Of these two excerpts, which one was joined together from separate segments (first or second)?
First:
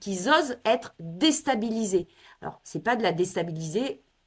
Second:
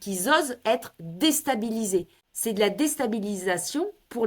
second